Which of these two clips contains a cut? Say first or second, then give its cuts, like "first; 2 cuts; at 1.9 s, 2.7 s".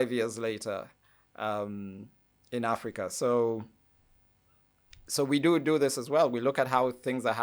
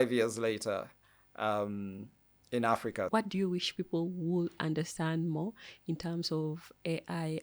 second; 1 cut; at 3.1 s